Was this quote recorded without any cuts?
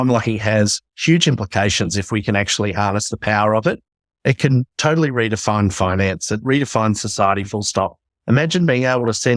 no; 1 cut; at 6.4 s

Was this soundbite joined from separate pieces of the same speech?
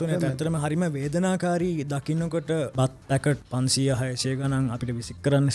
yes; 2 cuts; at 2.7 s, 3.4 s

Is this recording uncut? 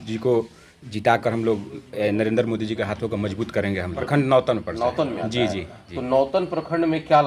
yes; 0 cuts

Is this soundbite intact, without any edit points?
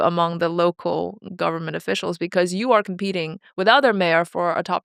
yes; 0 cuts

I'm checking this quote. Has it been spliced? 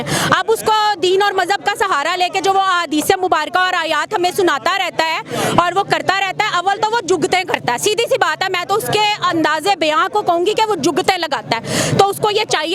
no; 0 cuts

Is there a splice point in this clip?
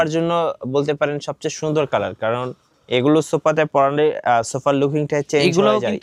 no; 0 cuts

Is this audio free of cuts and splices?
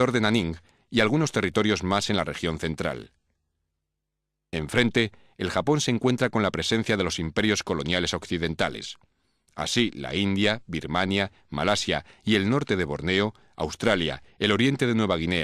no; 1 cut; at 14.5 s

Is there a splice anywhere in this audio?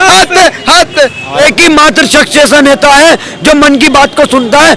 yes; 1 cut; at 1.4 s

